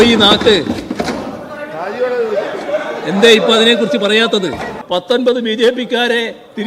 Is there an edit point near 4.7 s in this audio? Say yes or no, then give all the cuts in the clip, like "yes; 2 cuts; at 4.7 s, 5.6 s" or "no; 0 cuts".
yes; 1 cut; at 4.7 s